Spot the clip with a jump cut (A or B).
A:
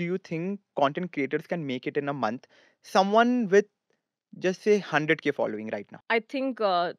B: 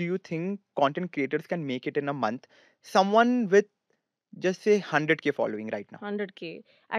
A